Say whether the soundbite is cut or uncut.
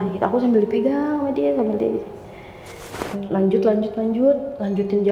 cut